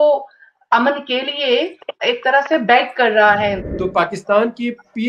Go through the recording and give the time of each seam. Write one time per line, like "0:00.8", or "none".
0:02.0
0:03.7